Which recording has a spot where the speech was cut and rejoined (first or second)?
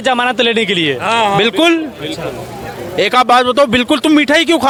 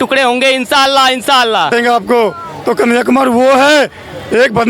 second